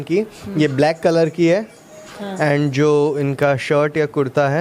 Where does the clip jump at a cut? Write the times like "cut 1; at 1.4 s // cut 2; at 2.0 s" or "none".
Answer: none